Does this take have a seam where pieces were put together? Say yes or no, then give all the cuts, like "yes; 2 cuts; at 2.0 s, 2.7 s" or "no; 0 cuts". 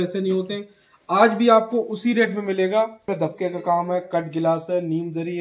yes; 1 cut; at 3.0 s